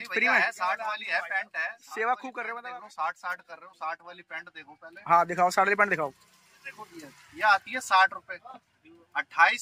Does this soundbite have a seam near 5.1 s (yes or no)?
no